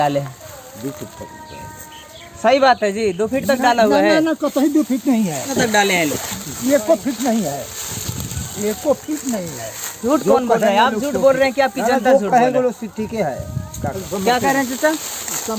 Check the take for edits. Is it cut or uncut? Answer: cut